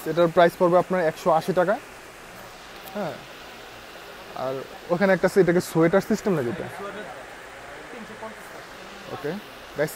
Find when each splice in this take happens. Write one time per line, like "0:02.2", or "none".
none